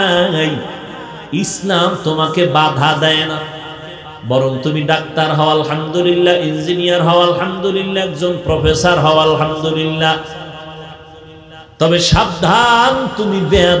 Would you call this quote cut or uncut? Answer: uncut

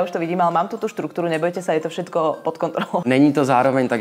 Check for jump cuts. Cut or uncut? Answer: cut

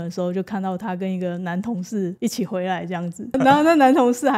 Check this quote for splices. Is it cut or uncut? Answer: cut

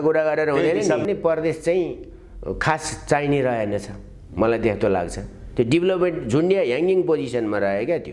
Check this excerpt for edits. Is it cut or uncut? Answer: cut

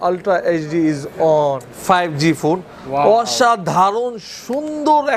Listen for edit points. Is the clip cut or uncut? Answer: cut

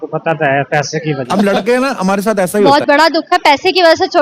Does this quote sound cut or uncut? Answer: uncut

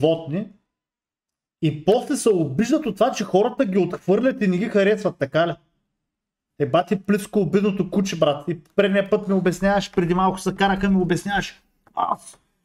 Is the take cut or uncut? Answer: uncut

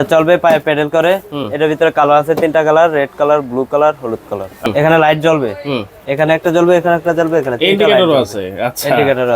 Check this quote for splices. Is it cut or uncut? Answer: cut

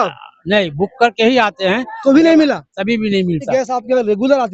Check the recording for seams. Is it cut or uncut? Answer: cut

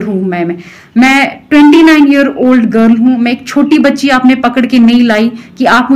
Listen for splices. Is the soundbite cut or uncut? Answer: uncut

